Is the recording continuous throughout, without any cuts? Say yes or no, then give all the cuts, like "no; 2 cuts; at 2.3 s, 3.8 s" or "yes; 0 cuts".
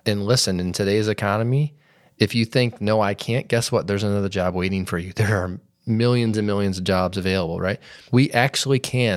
no; 1 cut; at 7.9 s